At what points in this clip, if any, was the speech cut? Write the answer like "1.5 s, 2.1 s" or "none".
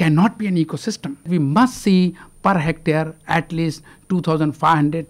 1.3 s